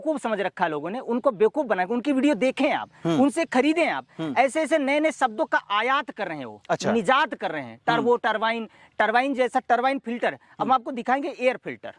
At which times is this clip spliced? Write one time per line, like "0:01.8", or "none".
none